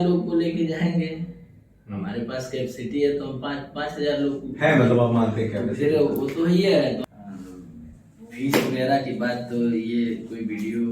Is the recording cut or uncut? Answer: cut